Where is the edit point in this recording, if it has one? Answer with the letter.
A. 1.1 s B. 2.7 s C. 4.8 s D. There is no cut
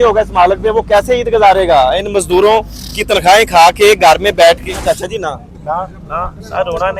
C